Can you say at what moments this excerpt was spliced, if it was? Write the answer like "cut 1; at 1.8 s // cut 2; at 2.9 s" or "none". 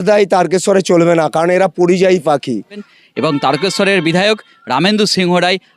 cut 1; at 2.9 s